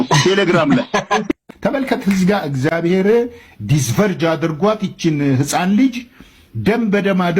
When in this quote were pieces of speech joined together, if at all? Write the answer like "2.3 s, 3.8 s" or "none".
2.7 s